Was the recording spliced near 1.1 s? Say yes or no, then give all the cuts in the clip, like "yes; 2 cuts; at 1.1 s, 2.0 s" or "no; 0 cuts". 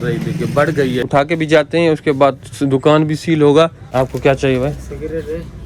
yes; 2 cuts; at 1.1 s, 3.8 s